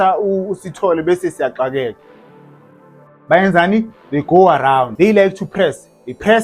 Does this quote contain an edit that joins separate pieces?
yes; 1 cut; at 4.9 s

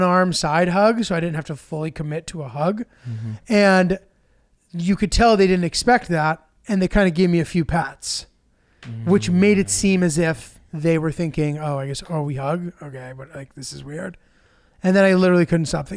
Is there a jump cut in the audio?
no; 0 cuts

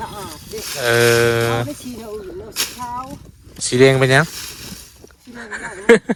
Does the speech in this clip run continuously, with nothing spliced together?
yes; 0 cuts

